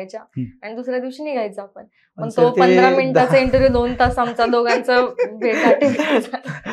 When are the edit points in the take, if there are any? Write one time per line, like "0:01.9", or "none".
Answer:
none